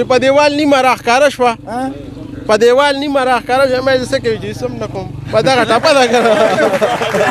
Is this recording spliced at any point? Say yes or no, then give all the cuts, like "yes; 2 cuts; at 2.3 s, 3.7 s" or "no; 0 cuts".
no; 0 cuts